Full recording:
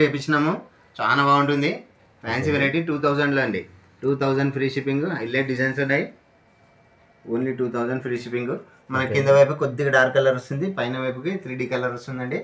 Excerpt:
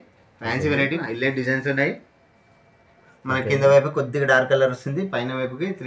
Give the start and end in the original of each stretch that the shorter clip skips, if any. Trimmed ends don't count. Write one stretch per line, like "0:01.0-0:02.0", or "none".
0:02.8-0:05.1
0:07.2-0:08.7